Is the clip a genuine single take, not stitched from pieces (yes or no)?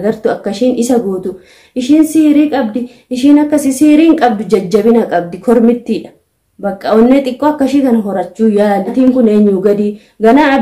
yes